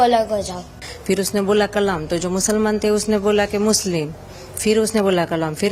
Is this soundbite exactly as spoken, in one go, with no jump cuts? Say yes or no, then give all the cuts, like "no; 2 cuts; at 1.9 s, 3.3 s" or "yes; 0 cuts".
yes; 0 cuts